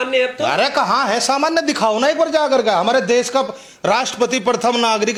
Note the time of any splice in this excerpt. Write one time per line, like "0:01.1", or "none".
none